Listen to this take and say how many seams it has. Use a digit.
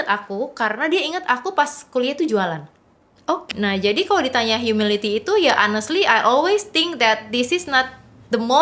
1